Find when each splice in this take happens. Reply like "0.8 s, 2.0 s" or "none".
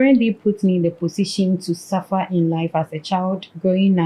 none